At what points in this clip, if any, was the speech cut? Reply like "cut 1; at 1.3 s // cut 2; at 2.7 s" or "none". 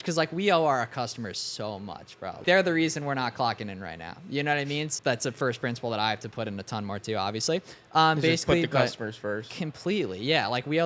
cut 1; at 2.4 s // cut 2; at 4.9 s